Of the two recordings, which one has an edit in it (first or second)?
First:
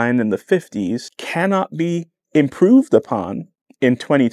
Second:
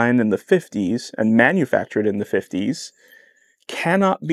first